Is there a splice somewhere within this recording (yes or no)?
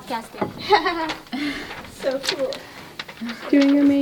no